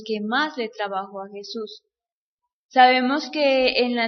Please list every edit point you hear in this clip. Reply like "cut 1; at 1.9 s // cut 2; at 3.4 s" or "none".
none